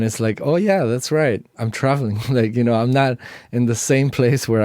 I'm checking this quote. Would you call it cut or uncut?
cut